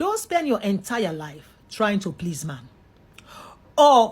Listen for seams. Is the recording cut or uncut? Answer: cut